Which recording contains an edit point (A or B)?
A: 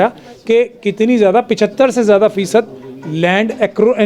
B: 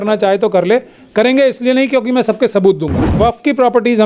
B